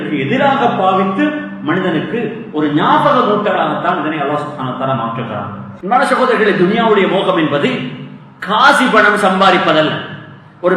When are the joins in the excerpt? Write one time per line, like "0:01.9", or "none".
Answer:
0:05.6